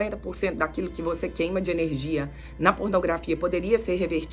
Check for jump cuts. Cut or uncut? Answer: uncut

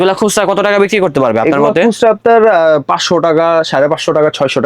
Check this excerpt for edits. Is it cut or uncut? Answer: uncut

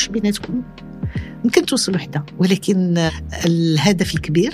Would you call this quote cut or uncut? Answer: cut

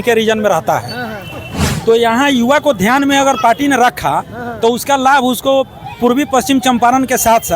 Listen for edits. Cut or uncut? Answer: cut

